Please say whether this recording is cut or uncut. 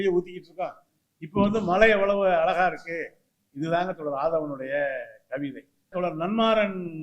cut